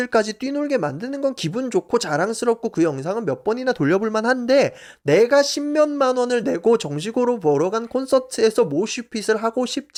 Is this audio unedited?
yes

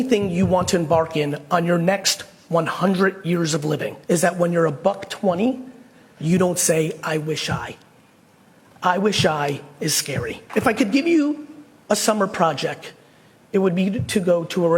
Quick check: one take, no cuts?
no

